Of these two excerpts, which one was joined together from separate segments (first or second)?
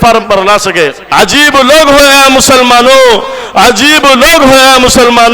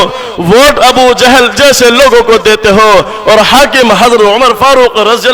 first